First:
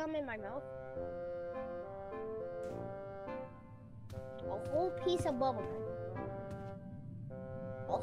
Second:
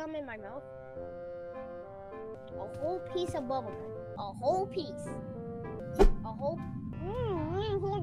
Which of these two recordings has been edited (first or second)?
second